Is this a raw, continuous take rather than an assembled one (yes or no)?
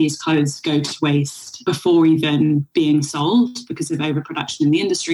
no